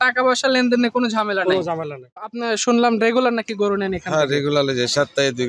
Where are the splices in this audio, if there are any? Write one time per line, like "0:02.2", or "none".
0:02.3